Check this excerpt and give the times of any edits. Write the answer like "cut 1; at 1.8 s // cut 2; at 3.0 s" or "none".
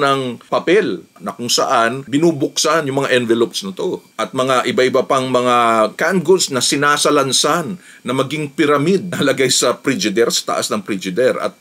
cut 1; at 1.2 s // cut 2; at 4.1 s